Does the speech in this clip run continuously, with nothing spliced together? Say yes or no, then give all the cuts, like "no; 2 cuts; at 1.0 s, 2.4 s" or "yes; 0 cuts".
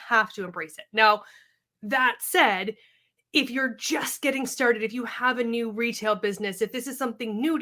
yes; 0 cuts